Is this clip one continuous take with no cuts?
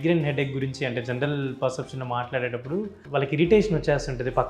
no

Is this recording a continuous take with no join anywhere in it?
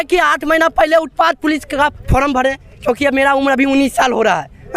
yes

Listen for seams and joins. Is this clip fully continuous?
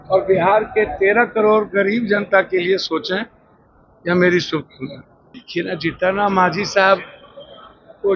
no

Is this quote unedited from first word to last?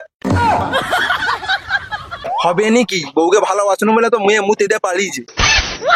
no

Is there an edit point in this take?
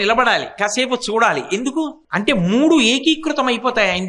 yes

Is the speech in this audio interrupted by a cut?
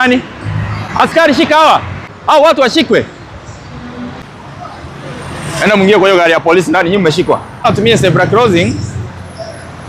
yes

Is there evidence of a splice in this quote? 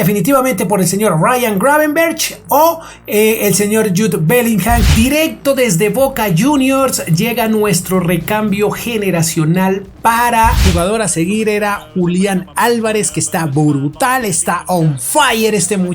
yes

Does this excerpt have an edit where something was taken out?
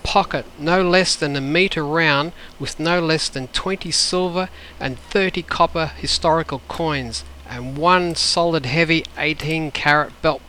no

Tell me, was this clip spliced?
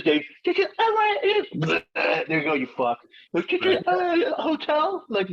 no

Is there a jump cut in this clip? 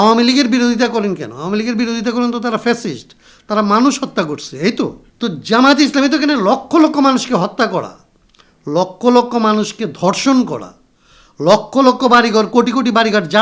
yes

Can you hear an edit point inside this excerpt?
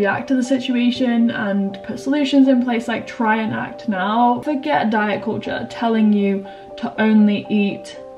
yes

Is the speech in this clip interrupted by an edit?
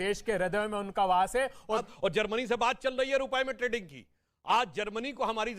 yes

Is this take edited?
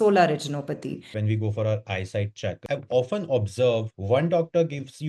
yes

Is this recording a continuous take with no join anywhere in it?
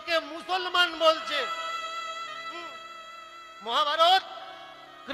yes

